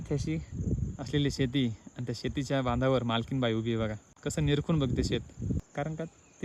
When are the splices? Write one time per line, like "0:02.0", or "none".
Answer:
0:00.9
0:04.1
0:05.7